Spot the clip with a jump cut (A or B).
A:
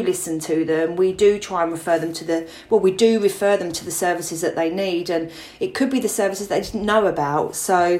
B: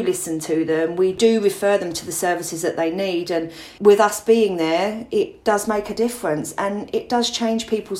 B